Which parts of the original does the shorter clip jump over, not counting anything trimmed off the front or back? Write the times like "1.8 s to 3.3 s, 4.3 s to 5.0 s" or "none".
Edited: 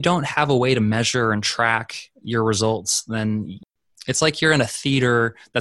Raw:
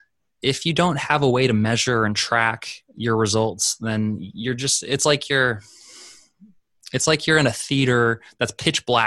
4.3 s to 6.4 s